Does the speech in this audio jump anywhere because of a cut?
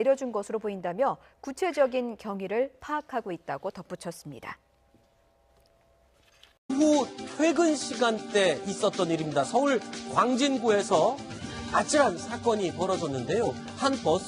no; 0 cuts

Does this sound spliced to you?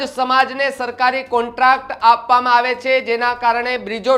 no; 0 cuts

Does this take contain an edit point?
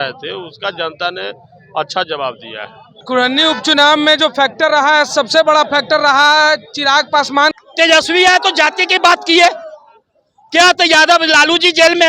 yes; 2 cuts; at 3.0 s, 7.5 s

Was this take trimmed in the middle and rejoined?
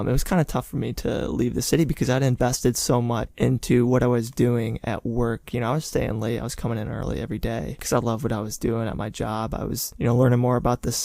no; 0 cuts

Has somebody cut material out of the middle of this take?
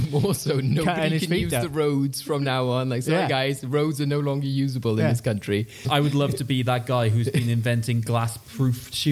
yes; 1 cut; at 5.8 s

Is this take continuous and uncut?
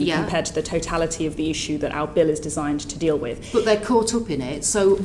yes; 0 cuts

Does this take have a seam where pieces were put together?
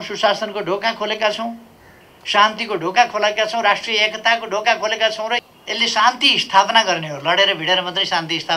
yes; 1 cut; at 5.5 s

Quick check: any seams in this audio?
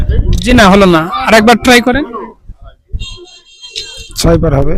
no; 0 cuts

